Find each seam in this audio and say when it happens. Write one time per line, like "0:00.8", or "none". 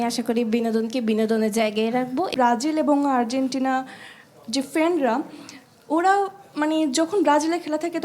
0:02.3